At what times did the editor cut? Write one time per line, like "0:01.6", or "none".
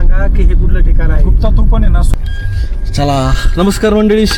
none